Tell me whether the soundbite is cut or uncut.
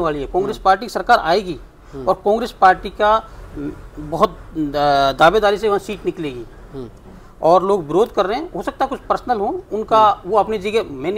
uncut